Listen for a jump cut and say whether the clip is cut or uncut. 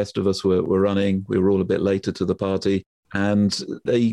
cut